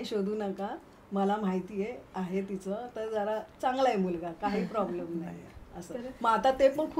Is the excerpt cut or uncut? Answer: uncut